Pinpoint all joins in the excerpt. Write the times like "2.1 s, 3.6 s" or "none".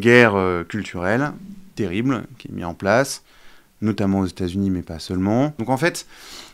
5.6 s